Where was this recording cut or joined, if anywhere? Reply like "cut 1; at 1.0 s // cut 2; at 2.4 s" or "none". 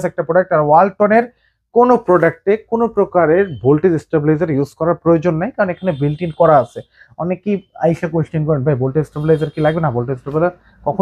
none